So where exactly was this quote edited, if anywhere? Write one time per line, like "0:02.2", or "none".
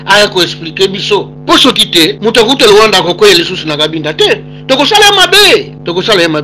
none